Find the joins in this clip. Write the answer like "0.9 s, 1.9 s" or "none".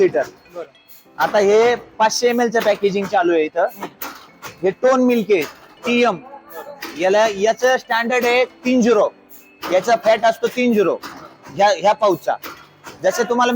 none